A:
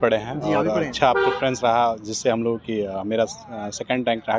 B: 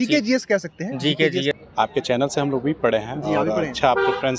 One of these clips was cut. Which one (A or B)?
B